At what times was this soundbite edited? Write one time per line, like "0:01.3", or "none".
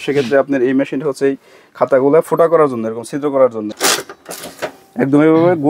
0:03.7